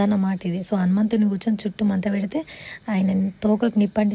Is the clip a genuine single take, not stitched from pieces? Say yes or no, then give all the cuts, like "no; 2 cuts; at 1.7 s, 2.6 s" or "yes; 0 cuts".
yes; 0 cuts